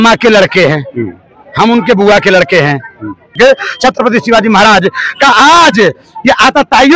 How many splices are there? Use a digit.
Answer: 1